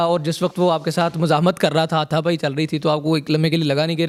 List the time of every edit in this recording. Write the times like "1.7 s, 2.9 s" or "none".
none